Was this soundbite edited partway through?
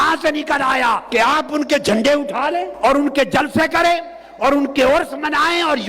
yes; 2 cuts; at 1.0 s, 2.7 s

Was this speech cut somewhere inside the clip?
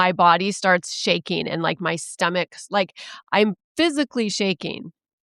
no; 0 cuts

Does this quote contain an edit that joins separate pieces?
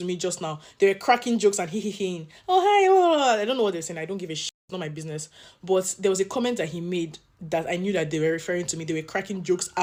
no; 0 cuts

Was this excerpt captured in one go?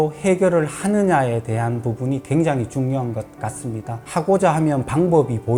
yes; 0 cuts

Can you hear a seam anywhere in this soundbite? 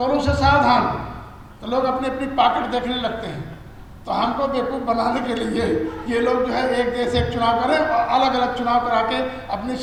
no; 0 cuts

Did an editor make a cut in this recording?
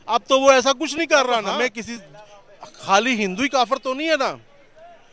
yes; 1 cut; at 0.9 s

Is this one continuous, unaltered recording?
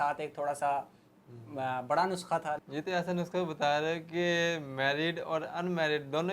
no; 1 cut; at 2.6 s

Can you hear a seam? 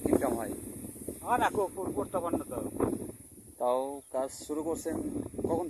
no; 0 cuts

